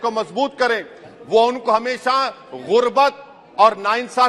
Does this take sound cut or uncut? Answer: uncut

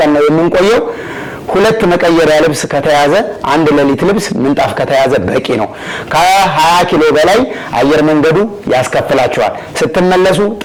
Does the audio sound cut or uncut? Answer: uncut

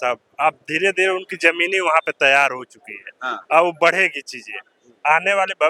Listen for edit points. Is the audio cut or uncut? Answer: uncut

